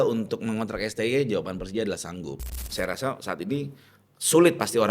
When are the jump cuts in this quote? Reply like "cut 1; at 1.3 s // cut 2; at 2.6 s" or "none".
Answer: cut 1; at 2.7 s

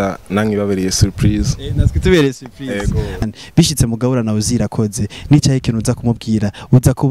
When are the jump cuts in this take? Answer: cut 1; at 3.2 s

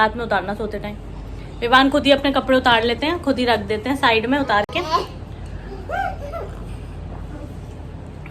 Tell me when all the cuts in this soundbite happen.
none

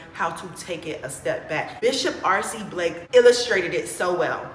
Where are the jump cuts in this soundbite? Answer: cut 1; at 1.7 s // cut 2; at 3.0 s

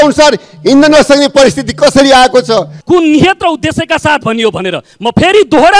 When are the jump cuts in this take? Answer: cut 1; at 2.8 s

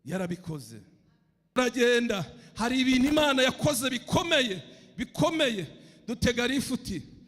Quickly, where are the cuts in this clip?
cut 1; at 1.6 s

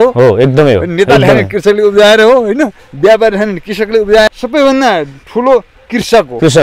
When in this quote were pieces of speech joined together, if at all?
cut 1; at 4.3 s

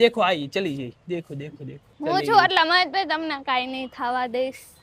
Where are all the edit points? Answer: cut 1; at 1.9 s

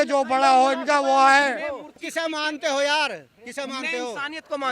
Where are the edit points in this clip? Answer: cut 1; at 2.0 s

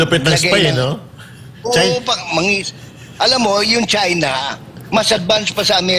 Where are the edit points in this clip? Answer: none

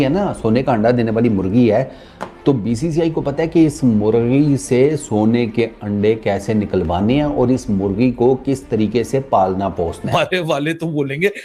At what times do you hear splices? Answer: cut 1; at 10.1 s

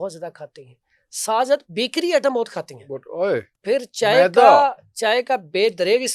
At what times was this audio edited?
none

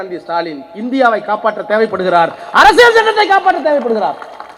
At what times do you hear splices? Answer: none

